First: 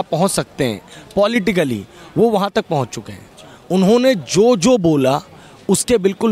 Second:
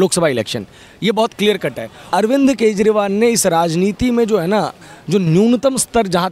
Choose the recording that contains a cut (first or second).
second